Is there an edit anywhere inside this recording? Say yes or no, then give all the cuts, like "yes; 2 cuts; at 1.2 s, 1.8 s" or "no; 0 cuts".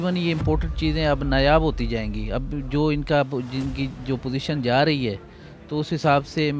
no; 0 cuts